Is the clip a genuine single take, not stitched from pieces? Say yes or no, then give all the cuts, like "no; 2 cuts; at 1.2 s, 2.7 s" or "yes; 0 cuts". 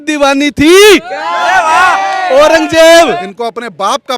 no; 1 cut; at 3.3 s